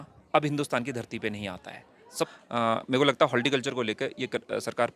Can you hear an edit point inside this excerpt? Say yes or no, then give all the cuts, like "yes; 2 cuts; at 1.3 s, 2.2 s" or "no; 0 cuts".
yes; 1 cut; at 2.3 s